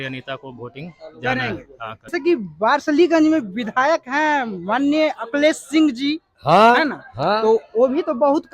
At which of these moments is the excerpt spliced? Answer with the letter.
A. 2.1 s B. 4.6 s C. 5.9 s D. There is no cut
A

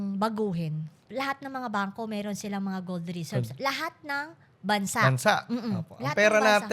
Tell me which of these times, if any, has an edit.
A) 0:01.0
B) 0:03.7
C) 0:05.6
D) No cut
A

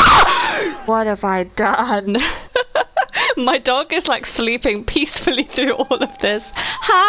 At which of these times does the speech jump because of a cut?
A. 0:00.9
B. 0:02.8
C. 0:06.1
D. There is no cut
D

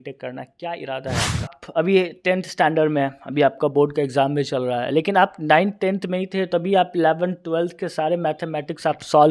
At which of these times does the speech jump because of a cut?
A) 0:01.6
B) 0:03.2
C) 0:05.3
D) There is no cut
A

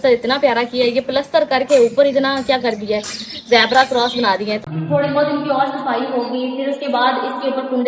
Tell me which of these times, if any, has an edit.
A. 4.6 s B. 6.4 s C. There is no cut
A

